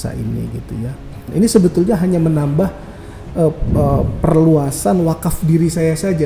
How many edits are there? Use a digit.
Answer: 1